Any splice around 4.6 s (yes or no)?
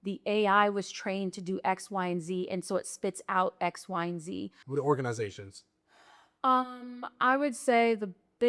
yes